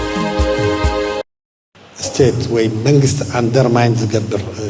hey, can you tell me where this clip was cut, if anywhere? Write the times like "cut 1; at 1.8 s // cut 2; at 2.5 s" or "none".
cut 1; at 1.1 s